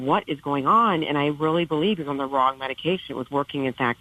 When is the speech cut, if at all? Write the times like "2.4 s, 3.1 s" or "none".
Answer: none

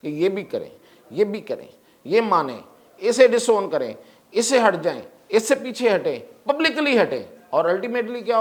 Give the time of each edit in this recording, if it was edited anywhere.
none

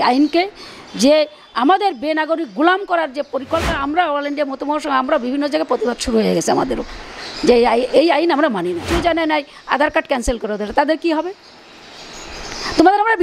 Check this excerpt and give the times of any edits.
3.7 s, 8.8 s

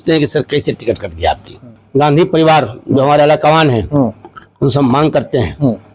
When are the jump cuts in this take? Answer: 1.8 s

